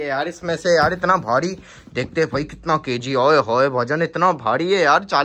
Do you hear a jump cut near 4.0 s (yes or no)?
no